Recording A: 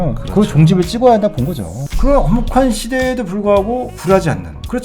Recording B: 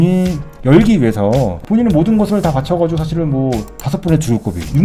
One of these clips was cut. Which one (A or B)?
A